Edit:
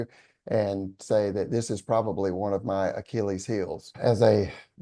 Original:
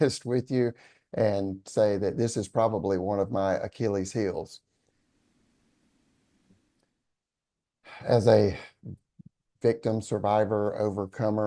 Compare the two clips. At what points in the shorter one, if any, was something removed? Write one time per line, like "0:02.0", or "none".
0:03.8

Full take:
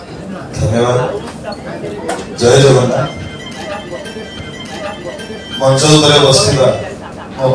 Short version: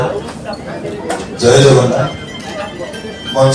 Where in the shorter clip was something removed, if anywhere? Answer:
0:02.3

